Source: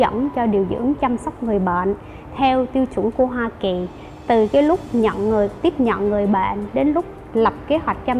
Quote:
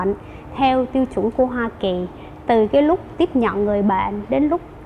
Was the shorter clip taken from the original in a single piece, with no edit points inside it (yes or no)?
no